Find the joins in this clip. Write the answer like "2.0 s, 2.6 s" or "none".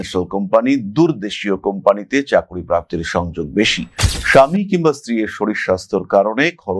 none